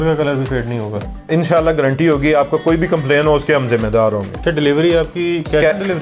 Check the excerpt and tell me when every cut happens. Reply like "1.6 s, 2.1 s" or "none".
4.4 s

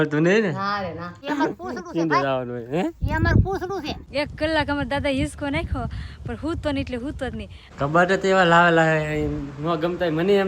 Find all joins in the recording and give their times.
1.1 s, 4.1 s, 7.6 s

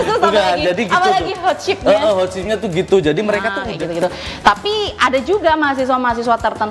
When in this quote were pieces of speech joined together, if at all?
3.6 s

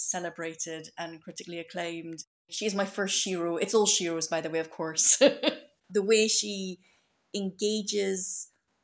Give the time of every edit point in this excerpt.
2.5 s, 5.7 s

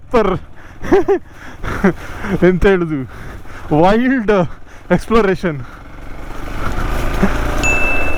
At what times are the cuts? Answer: none

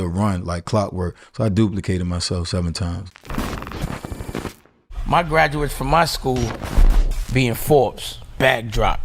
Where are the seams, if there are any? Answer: 3.1 s

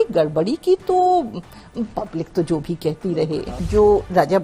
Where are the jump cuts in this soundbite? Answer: 3.4 s

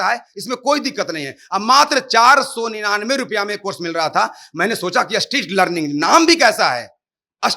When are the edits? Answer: none

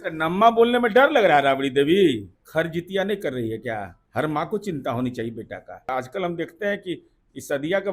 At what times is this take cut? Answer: 2.3 s, 4.0 s, 5.9 s

